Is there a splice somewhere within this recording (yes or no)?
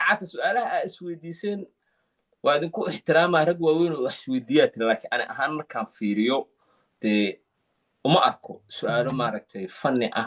no